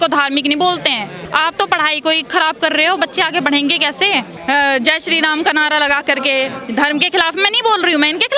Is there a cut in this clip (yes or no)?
yes